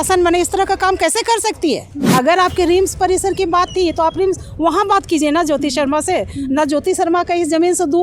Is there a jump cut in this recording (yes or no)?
yes